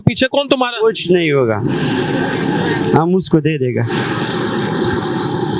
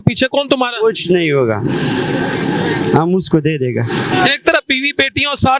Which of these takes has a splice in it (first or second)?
second